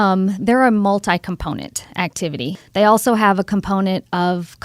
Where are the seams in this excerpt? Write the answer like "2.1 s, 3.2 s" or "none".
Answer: 2.5 s